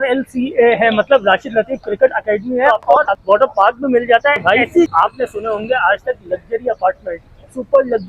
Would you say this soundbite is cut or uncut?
cut